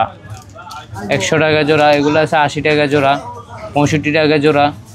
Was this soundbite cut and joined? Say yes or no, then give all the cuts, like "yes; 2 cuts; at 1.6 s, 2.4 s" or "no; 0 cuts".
no; 0 cuts